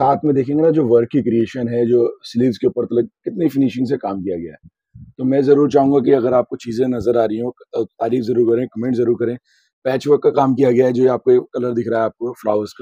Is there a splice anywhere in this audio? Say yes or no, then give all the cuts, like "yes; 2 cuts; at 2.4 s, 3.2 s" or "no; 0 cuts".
no; 0 cuts